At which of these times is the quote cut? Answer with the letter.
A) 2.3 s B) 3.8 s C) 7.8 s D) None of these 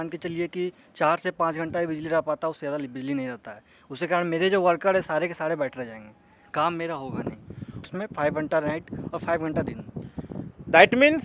C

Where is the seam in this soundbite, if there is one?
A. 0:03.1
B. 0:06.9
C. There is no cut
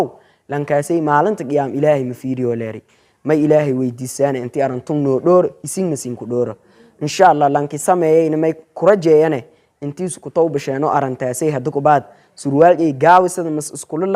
C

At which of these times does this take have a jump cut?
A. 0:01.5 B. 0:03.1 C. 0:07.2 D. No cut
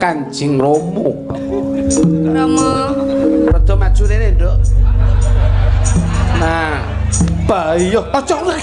D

